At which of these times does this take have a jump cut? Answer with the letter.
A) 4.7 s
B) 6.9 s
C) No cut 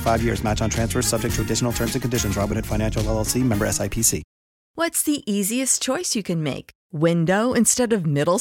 A